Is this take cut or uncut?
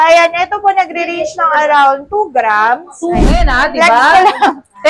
cut